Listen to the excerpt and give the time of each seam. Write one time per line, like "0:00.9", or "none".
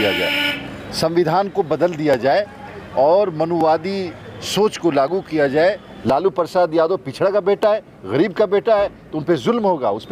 0:05.9